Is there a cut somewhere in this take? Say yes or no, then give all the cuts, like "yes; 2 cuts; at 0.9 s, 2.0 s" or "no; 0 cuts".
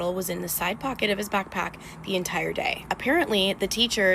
yes; 1 cut; at 2.9 s